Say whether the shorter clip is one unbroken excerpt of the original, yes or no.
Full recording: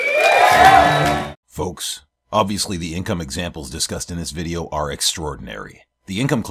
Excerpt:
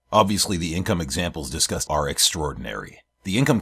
no